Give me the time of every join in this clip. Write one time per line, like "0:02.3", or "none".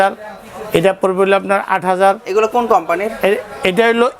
none